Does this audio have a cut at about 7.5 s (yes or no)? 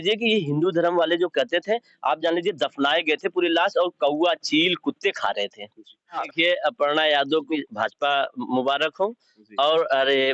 yes